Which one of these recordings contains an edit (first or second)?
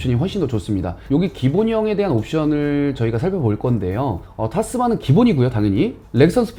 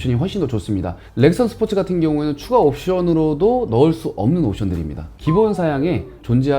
second